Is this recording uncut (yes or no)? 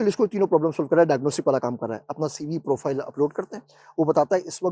yes